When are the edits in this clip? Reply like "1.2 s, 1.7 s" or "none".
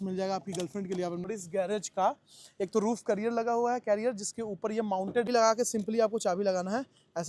1.3 s, 5.3 s